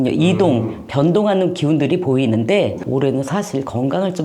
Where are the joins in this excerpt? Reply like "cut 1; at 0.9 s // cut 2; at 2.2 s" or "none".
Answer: cut 1; at 2.8 s